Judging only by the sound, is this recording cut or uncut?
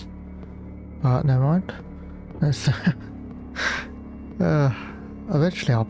uncut